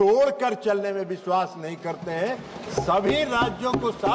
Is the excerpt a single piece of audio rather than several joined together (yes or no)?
yes